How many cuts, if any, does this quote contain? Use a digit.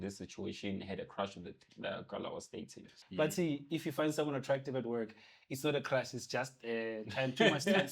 1